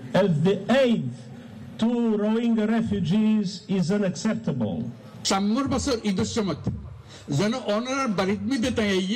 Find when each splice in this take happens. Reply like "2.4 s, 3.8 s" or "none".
5.1 s